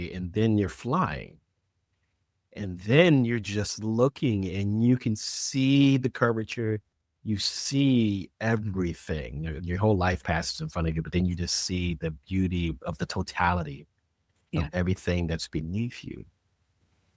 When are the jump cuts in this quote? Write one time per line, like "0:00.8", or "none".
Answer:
none